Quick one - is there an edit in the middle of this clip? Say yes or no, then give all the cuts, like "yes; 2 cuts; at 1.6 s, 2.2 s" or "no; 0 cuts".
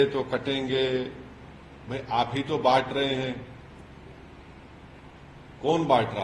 no; 0 cuts